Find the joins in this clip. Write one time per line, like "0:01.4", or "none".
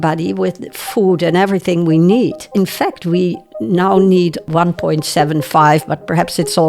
0:02.4
0:04.5